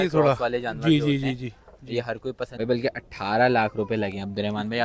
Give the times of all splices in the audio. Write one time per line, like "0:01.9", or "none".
0:02.5